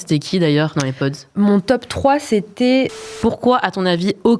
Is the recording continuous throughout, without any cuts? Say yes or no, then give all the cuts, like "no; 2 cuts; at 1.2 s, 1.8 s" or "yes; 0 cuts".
no; 1 cut; at 2.9 s